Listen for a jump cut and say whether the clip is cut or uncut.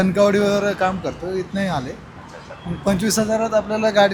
uncut